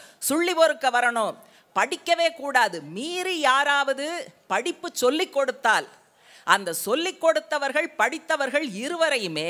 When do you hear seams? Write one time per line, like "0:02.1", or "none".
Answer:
none